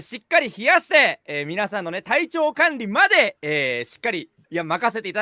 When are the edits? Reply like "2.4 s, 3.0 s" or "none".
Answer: none